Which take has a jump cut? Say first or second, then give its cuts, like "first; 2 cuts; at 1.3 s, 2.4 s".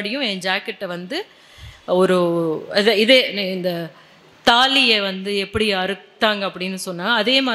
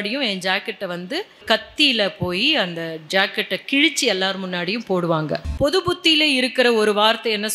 second; 2 cuts; at 1.4 s, 5.4 s